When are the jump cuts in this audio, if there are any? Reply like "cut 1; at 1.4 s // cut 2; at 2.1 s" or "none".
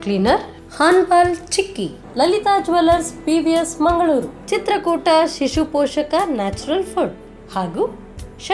none